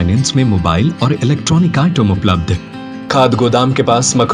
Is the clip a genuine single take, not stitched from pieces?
no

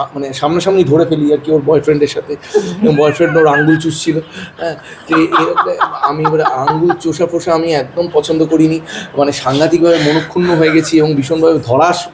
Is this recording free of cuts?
yes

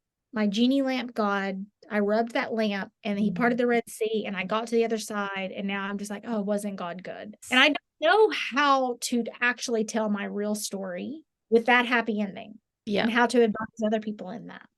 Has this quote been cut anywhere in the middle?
no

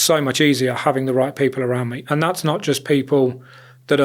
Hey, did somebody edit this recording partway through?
no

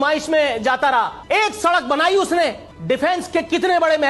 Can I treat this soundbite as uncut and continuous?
no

